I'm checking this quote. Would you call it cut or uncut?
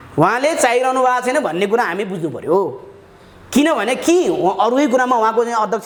uncut